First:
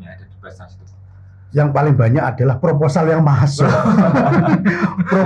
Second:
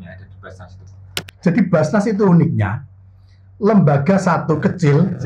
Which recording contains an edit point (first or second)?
second